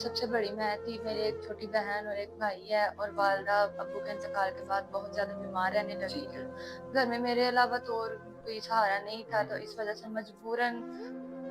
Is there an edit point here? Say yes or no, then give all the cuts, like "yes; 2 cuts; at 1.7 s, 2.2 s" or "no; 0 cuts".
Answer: no; 0 cuts